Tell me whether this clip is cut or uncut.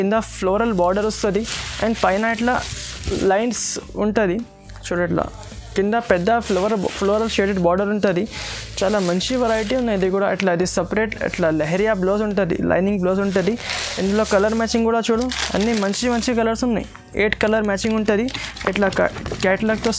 uncut